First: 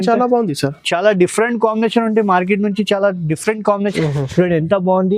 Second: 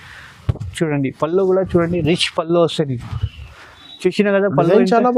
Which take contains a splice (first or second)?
first